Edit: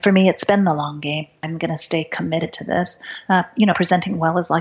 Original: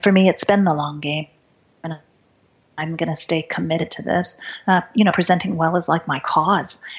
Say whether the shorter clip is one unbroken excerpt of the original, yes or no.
no